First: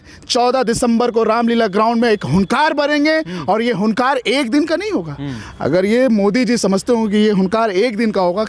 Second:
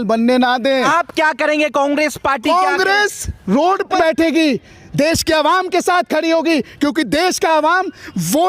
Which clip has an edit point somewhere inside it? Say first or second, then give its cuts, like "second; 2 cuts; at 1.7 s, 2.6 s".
second; 2 cuts; at 0.9 s, 4.0 s